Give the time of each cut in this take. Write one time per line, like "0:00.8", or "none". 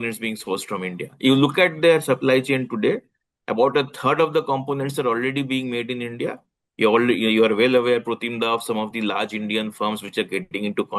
none